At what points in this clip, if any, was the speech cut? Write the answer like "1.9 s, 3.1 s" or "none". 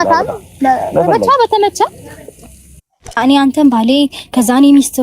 3.2 s